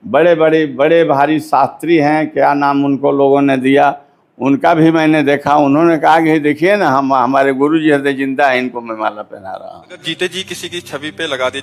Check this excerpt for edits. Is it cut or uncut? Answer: uncut